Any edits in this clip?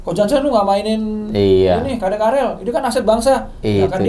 no; 0 cuts

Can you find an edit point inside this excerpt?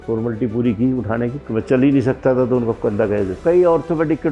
yes; 2 cuts; at 1.4 s, 3.4 s

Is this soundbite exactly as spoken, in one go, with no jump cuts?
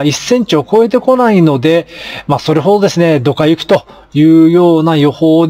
yes; 0 cuts

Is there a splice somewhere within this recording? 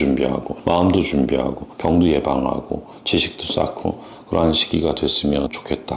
no; 0 cuts

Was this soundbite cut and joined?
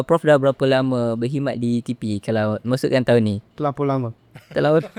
no; 0 cuts

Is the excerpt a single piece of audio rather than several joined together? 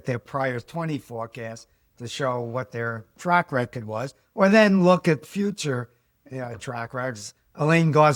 yes; 0 cuts

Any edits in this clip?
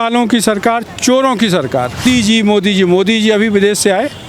yes; 1 cut; at 2.0 s

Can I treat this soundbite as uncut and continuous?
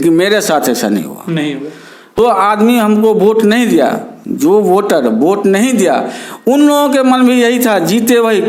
no; 1 cut; at 2.2 s

